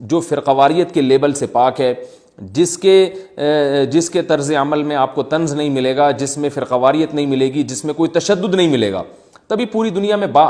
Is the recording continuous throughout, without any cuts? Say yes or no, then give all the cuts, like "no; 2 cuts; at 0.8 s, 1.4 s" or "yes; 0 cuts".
yes; 0 cuts